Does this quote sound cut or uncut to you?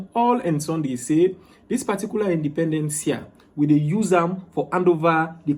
uncut